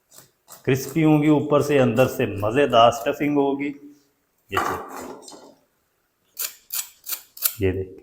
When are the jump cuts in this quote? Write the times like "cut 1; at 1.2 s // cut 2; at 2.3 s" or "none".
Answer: cut 1; at 6.3 s